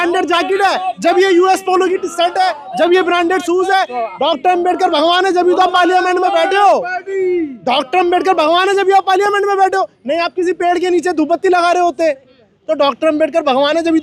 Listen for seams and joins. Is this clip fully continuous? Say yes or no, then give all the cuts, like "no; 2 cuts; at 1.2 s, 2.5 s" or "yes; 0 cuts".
yes; 0 cuts